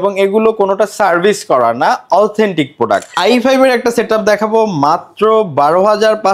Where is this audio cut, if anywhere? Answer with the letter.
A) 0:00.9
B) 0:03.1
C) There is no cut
B